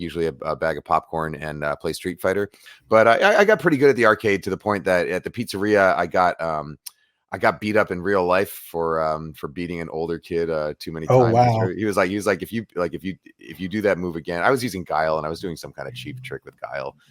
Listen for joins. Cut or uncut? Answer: cut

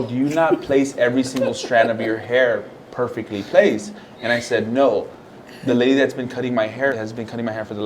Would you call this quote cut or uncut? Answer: cut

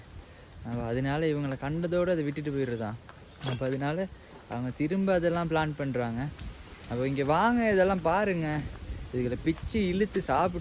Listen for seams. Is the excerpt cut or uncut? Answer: uncut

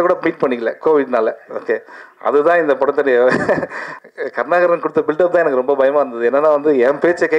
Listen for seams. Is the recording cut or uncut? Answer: cut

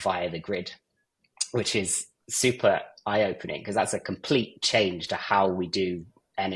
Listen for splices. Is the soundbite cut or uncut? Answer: uncut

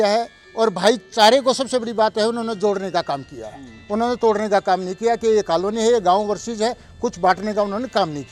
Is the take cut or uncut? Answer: uncut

